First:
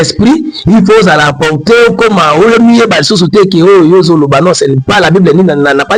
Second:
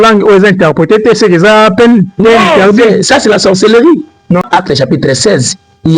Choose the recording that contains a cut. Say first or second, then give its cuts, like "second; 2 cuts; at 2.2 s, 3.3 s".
second; 1 cut; at 4.4 s